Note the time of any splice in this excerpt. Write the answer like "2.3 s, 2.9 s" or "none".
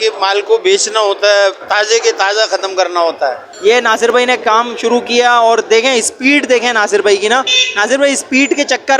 3.5 s